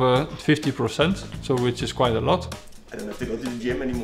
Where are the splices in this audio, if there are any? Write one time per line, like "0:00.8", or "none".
0:02.6